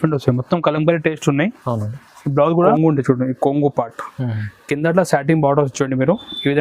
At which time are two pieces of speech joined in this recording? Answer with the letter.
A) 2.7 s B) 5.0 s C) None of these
A